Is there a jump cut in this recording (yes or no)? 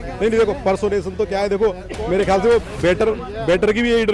no